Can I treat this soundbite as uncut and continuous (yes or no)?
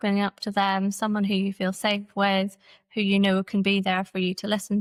yes